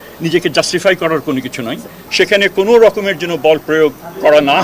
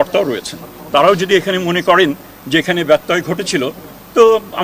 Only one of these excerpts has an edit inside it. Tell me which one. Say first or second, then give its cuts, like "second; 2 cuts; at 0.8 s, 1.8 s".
first; 1 cut; at 2.0 s